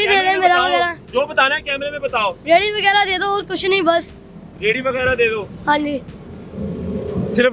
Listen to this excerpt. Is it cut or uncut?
uncut